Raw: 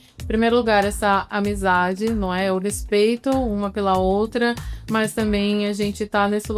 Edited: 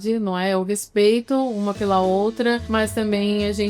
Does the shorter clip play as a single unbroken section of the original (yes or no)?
no